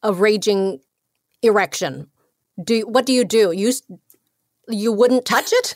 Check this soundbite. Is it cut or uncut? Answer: uncut